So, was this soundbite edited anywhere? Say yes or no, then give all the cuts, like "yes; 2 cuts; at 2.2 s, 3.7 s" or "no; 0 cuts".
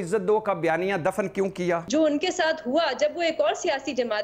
yes; 1 cut; at 1.8 s